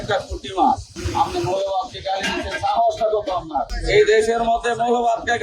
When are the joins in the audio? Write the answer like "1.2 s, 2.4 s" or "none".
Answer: 0.9 s, 3.8 s